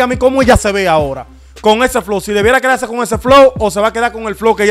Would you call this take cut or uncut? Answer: uncut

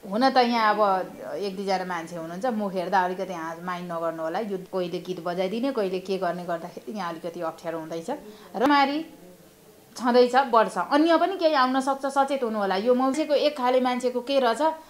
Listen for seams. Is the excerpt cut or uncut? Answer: cut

